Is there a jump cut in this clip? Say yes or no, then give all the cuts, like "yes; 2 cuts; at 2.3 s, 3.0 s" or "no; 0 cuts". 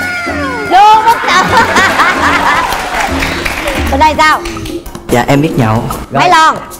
no; 0 cuts